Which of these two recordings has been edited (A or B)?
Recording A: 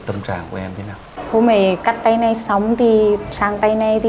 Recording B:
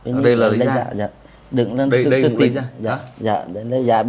A